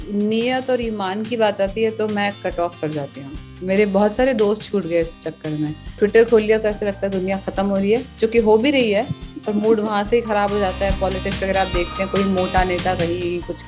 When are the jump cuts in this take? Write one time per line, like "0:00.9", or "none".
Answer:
0:06.0